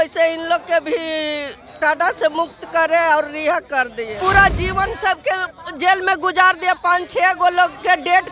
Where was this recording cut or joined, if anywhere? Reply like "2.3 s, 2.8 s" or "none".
4.1 s